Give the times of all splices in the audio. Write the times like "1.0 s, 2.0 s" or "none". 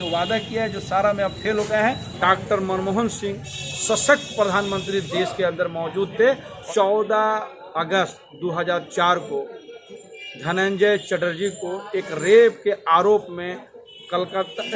2.1 s, 6.6 s